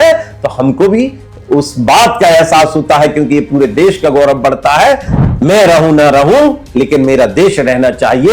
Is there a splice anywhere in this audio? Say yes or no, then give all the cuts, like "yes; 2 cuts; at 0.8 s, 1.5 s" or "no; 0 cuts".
yes; 1 cut; at 5.1 s